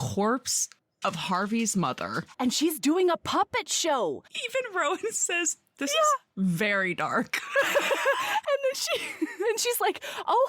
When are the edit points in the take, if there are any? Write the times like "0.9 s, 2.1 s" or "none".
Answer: 4.3 s